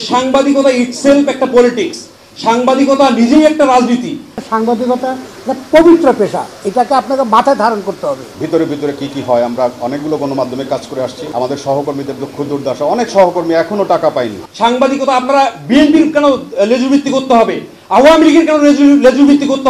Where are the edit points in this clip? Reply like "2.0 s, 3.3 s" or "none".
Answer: 4.4 s, 8.3 s, 14.4 s